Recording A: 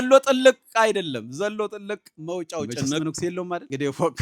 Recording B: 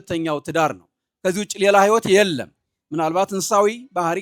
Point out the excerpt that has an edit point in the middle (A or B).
A